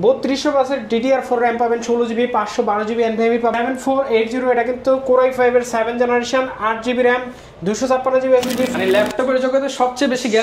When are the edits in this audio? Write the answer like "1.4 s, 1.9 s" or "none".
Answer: 3.5 s, 8.7 s